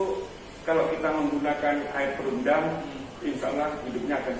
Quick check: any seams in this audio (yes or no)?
no